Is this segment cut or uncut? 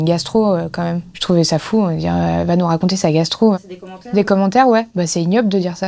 uncut